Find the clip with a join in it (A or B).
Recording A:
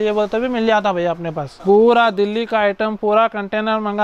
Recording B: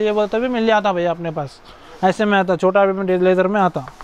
A